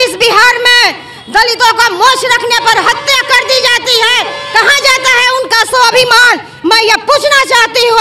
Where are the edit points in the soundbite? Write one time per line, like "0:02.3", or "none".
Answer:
none